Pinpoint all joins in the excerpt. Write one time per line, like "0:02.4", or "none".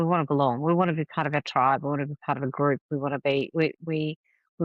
none